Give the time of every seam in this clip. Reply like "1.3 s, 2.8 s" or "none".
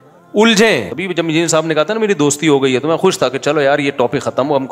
0.9 s

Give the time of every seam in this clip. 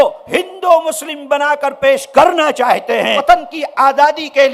3.2 s

